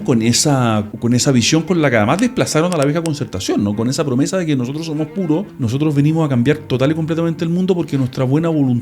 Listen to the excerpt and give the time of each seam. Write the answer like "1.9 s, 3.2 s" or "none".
0.9 s, 5.5 s